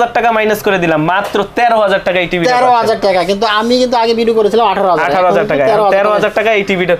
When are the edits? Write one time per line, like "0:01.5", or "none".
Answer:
none